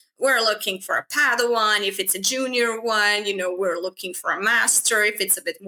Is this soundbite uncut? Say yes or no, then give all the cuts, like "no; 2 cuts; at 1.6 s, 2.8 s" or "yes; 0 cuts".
yes; 0 cuts